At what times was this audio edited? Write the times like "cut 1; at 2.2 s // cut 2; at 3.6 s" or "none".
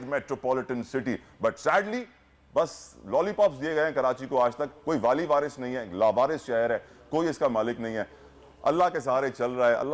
none